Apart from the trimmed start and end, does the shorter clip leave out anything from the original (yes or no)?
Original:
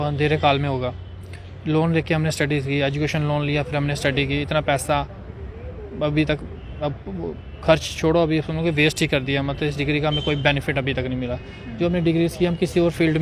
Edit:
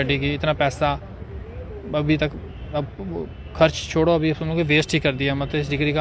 no